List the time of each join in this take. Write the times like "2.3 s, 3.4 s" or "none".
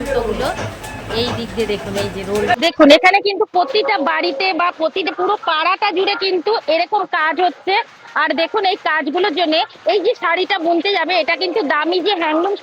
2.6 s